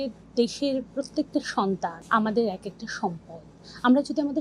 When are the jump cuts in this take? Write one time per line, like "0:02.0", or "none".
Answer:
0:02.0